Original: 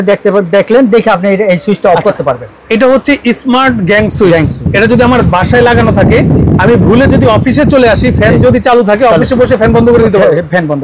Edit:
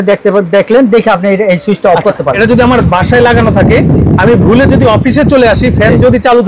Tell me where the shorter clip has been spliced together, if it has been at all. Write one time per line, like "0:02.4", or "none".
0:02.4